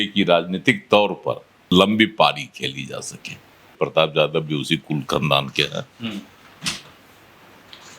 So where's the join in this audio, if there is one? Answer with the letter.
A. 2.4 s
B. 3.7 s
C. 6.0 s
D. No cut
B